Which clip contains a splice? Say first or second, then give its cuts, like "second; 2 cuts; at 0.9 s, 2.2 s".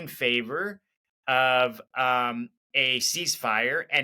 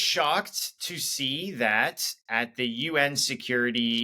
first; 1 cut; at 2.6 s